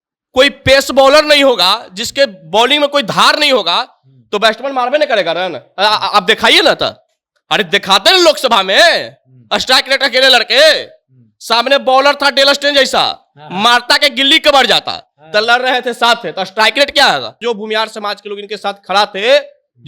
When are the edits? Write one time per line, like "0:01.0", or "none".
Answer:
0:17.4